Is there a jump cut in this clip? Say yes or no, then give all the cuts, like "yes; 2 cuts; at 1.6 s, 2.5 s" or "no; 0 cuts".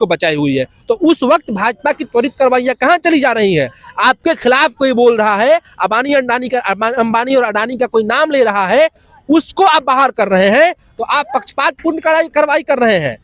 no; 0 cuts